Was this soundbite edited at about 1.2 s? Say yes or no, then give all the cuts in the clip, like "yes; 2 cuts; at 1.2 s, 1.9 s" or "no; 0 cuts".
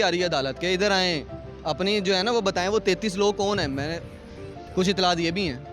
no; 0 cuts